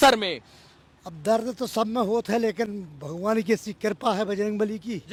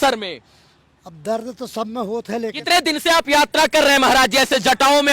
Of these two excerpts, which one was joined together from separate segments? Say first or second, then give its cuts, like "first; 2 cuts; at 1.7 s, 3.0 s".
second; 1 cut; at 2.6 s